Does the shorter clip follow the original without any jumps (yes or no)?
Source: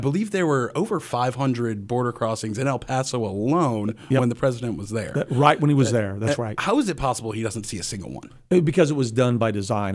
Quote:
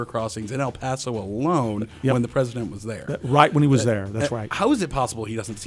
yes